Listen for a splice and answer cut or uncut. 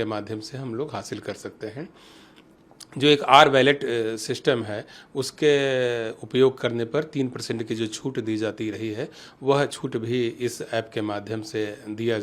uncut